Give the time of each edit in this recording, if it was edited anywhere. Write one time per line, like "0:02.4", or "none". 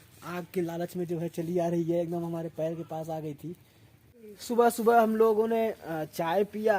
0:04.4